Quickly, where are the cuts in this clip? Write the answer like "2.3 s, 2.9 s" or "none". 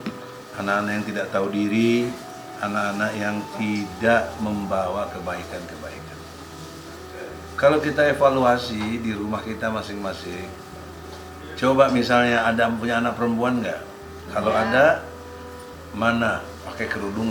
none